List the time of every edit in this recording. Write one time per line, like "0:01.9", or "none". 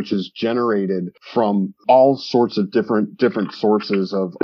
none